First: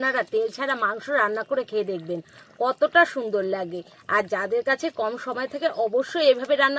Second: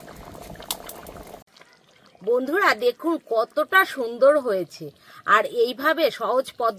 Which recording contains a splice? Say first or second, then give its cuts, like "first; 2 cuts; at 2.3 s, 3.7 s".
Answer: second; 1 cut; at 1.4 s